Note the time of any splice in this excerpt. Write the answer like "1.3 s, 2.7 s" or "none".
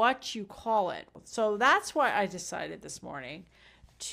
1.1 s